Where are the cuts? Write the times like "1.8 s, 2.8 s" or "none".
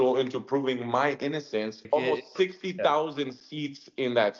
1.8 s